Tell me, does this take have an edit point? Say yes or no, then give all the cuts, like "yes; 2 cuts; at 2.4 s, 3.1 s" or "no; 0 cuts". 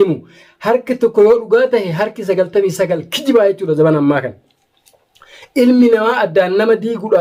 no; 0 cuts